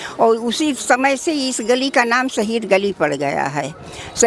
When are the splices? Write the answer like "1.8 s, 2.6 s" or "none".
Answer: none